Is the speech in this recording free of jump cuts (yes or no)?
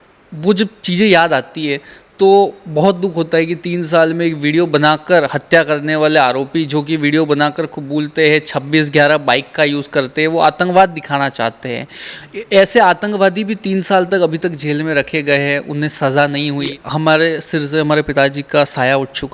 no